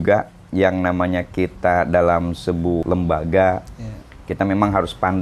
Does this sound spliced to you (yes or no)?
yes